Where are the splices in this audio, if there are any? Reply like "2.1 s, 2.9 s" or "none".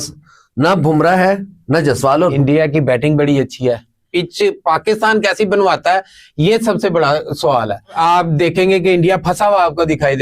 2.3 s, 4.1 s, 8.0 s